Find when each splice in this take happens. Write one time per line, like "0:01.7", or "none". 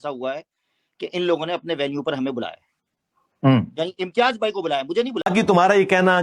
0:05.2